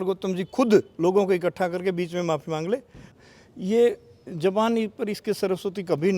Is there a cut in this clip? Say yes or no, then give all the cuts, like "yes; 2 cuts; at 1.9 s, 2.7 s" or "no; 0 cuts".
yes; 1 cut; at 3.1 s